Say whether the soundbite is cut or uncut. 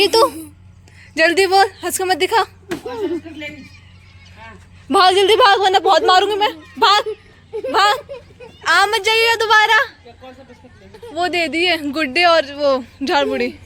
uncut